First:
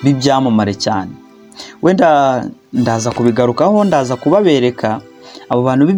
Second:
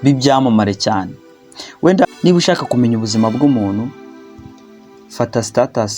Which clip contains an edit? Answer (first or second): second